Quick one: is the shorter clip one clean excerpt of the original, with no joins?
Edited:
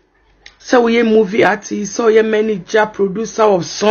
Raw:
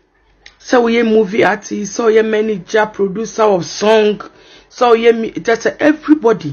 yes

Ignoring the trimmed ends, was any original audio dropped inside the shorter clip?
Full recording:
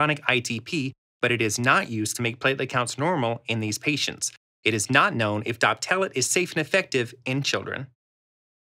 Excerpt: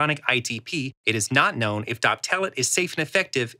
yes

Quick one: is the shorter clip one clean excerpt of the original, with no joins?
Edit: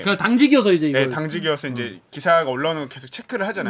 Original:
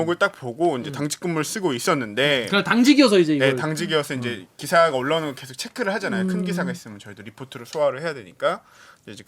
yes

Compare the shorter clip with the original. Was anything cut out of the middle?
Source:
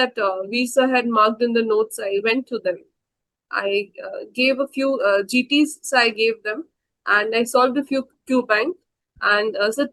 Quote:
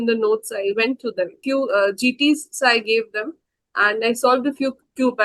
yes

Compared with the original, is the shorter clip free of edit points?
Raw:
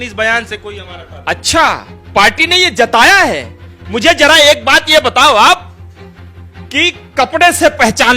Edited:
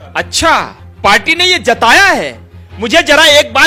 yes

